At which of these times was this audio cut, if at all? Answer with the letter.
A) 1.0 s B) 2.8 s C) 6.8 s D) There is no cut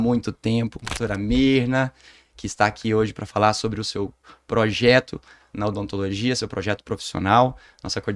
A